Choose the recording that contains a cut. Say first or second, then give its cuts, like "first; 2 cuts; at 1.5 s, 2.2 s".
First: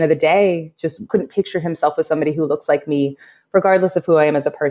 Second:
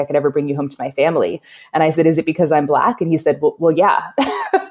first; 1 cut; at 1.1 s